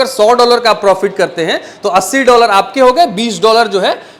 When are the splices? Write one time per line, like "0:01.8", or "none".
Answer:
none